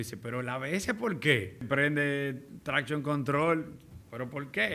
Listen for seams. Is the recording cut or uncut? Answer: cut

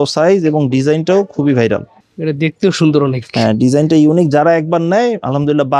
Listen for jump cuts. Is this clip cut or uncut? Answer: cut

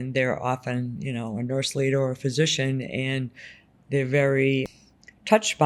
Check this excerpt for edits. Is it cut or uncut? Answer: cut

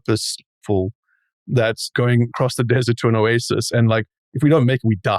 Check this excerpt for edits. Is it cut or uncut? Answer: cut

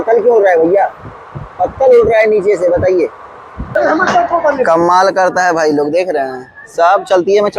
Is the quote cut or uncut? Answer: cut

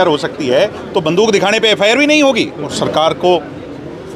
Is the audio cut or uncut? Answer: cut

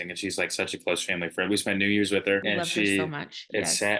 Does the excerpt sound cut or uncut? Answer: cut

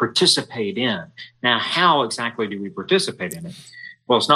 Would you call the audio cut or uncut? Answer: uncut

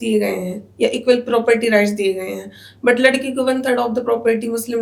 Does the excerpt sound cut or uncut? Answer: uncut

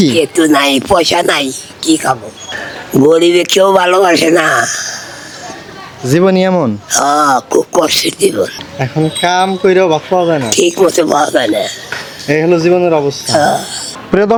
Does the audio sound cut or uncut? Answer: uncut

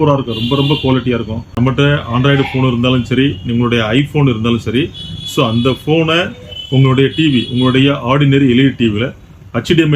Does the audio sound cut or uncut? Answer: cut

